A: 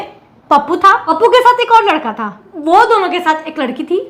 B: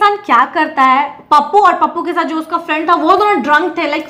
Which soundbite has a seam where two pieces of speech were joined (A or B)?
A